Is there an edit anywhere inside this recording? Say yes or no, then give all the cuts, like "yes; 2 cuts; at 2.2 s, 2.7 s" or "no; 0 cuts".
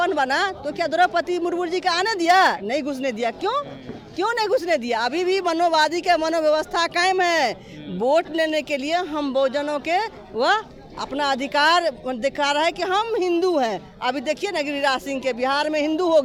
no; 0 cuts